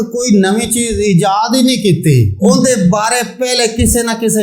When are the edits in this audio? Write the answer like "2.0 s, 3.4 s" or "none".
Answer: 2.4 s